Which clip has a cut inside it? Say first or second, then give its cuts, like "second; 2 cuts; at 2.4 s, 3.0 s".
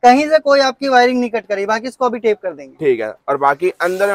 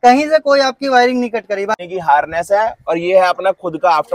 second; 1 cut; at 1.8 s